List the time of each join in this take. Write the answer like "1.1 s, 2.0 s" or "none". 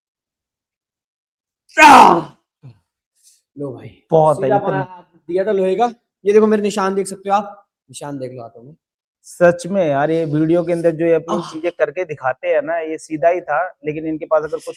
none